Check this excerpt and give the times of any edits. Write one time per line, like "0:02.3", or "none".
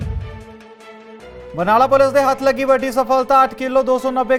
none

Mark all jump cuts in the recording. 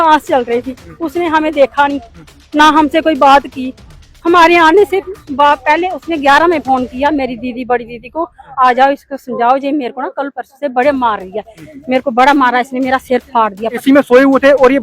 0:13.7

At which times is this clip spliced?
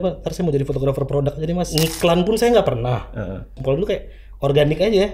0:01.7
0:03.6

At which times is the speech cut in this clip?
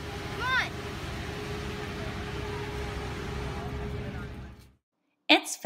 0:01.2

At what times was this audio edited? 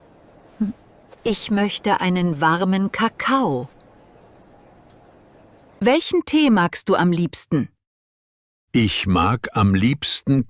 0:05.8

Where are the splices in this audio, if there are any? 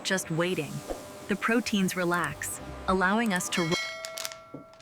0:03.7

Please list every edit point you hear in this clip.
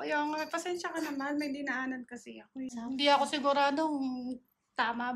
0:02.7

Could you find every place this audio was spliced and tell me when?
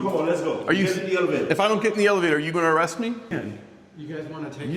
0:03.3

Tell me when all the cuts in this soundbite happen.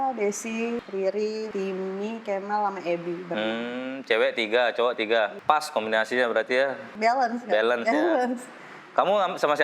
0:00.8
0:01.5
0:05.4
0:06.8

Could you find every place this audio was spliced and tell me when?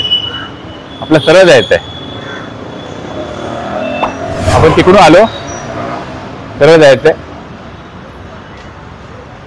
none

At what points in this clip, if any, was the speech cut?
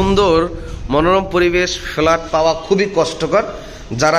none

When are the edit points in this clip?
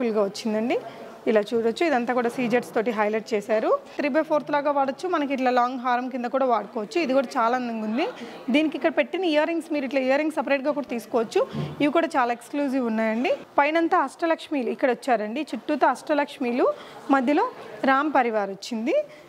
0:03.9
0:13.4

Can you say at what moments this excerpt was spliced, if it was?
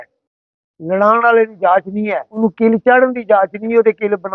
0:02.4

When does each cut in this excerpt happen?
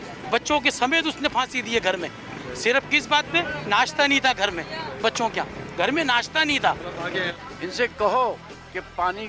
0:07.3

